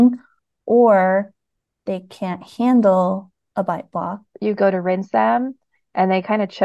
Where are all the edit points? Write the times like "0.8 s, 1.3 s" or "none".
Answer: 4.3 s